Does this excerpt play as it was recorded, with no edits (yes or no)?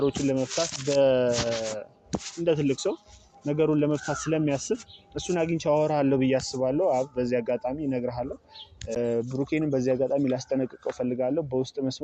no